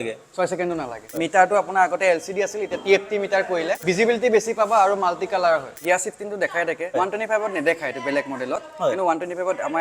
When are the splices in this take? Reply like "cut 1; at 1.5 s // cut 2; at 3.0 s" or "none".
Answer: cut 1; at 1.2 s // cut 2; at 3.8 s // cut 3; at 5.8 s // cut 4; at 6.9 s